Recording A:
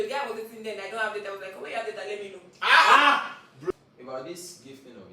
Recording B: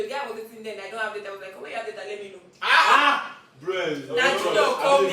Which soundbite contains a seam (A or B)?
A